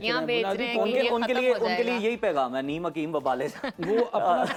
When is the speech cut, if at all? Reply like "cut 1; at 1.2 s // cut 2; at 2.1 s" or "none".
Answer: none

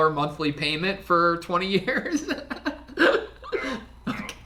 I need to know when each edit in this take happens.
none

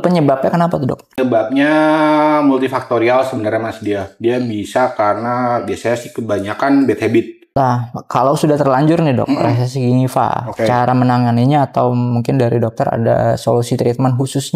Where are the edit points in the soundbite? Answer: cut 1; at 1.2 s // cut 2; at 7.4 s

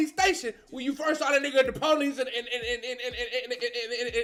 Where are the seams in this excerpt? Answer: none

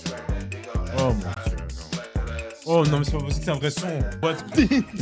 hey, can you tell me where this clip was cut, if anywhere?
cut 1; at 4.1 s

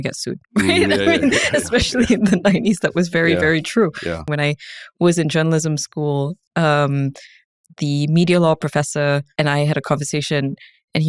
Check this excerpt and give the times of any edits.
cut 1; at 4.2 s // cut 2; at 9.3 s

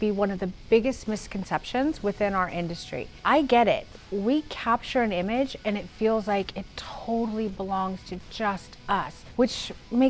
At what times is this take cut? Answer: cut 1; at 3.1 s // cut 2; at 9.2 s

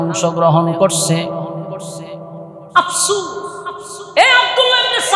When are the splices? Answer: none

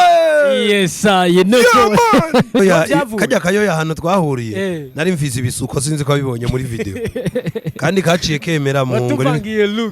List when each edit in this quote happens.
cut 1; at 2.6 s

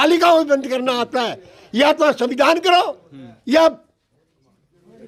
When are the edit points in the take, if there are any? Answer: none

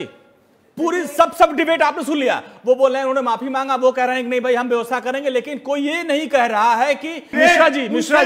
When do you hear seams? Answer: cut 1; at 7.3 s

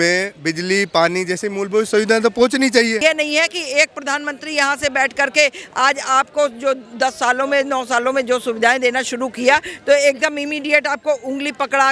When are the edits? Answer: cut 1; at 3.0 s

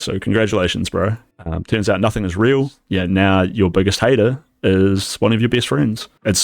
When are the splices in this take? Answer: cut 1; at 2.8 s

